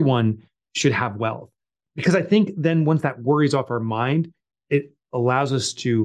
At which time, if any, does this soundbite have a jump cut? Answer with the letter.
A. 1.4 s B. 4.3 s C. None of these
C